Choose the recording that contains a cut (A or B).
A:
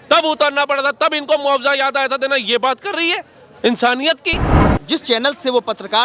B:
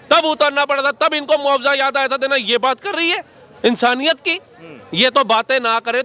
A